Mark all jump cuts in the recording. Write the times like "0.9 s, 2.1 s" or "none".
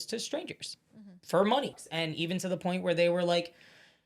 1.7 s